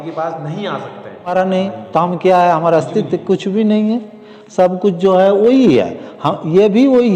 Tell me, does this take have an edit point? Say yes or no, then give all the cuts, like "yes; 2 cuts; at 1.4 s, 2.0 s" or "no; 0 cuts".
yes; 1 cut; at 1.3 s